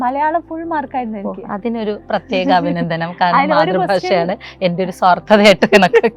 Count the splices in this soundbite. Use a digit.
0